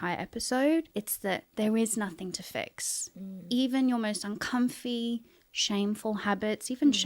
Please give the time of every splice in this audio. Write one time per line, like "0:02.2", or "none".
0:01.0